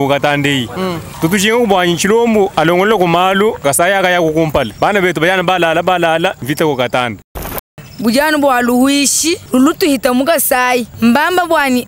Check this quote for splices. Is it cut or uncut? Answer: cut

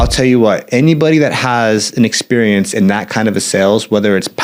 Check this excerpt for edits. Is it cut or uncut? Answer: uncut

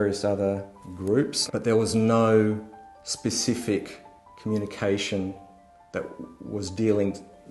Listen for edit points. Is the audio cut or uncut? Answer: cut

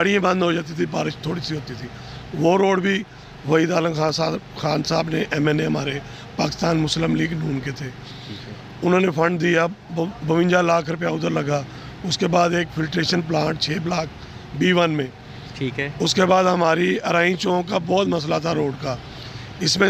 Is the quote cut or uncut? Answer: uncut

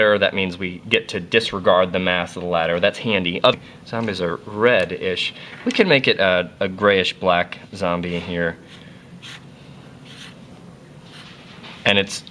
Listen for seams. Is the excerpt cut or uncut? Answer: uncut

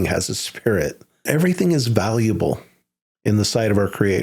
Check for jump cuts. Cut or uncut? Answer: cut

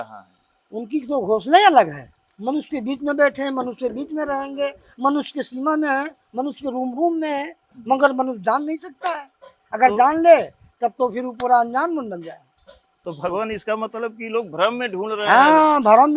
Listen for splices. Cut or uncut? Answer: uncut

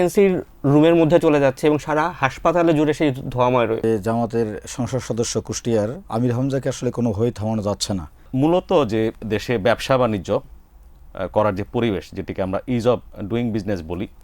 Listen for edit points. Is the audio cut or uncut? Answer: cut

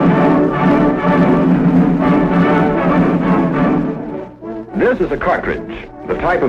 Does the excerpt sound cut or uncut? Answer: uncut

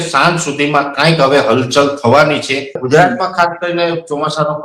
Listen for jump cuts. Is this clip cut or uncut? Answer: cut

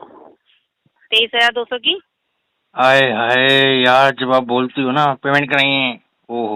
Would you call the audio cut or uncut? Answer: uncut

